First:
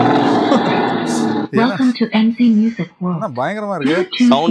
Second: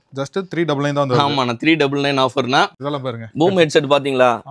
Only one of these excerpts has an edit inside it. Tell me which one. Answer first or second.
second